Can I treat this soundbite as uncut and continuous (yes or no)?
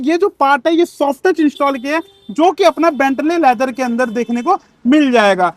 yes